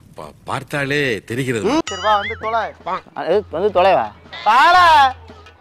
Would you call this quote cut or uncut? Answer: cut